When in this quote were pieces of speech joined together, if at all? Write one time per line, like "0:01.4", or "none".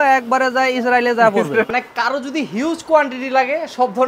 0:01.7